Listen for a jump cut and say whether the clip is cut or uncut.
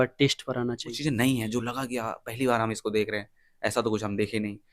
cut